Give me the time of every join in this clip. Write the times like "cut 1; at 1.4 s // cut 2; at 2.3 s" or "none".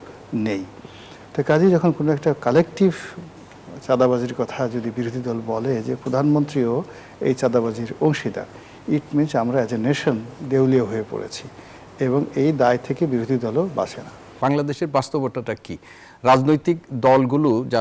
cut 1; at 14.2 s